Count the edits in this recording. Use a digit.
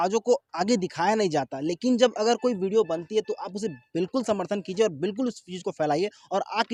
0